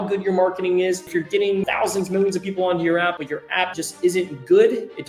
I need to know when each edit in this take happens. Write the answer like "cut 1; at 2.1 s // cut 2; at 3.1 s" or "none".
cut 1; at 1.6 s // cut 2; at 3.5 s